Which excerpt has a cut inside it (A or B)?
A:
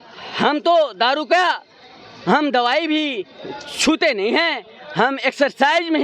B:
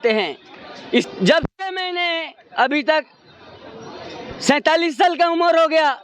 B